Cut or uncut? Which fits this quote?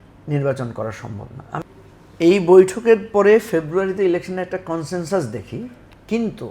cut